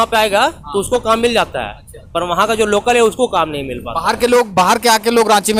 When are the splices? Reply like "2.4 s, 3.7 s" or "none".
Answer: none